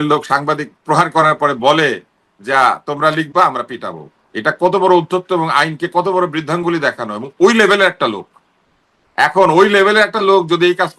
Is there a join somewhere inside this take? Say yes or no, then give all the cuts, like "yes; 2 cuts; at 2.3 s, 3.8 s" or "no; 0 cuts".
no; 0 cuts